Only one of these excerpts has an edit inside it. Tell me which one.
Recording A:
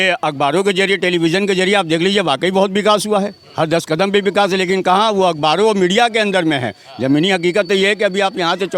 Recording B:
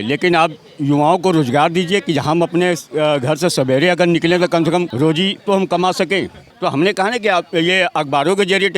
B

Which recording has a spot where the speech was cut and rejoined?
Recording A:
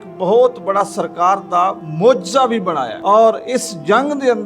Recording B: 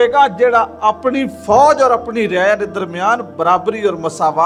A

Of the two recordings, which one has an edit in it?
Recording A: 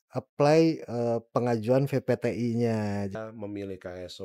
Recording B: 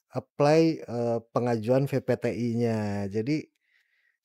A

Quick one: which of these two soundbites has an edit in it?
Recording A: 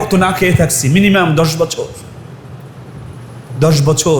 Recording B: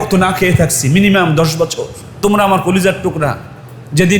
B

